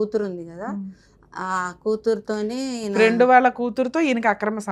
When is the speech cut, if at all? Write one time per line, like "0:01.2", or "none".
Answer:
none